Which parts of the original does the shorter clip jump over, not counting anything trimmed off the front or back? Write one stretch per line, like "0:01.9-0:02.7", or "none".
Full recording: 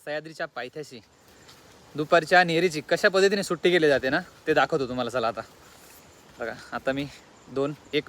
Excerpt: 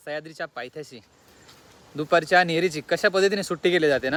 none

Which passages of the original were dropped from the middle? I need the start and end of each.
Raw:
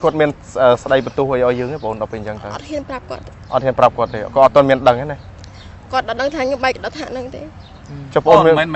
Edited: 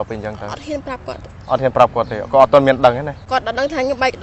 0:05.2-0:05.8

